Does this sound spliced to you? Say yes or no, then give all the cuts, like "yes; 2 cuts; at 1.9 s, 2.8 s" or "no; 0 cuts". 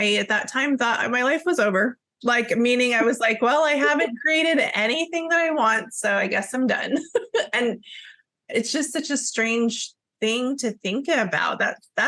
no; 0 cuts